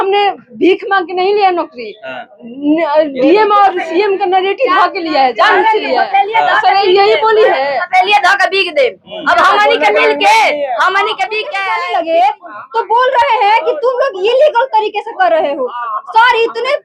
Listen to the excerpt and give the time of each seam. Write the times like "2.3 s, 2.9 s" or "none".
11.5 s